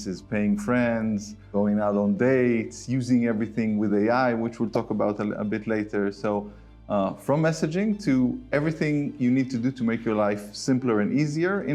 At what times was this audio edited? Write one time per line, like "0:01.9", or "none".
0:01.5